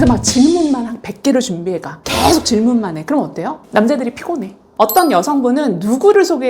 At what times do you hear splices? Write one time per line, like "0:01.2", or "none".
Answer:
0:04.7